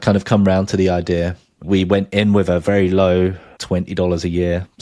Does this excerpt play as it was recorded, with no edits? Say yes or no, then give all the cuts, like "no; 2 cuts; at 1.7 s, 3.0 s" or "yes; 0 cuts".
no; 2 cuts; at 1.6 s, 3.5 s